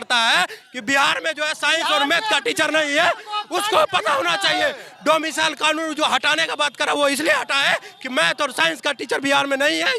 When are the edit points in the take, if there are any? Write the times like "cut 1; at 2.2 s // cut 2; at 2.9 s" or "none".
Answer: none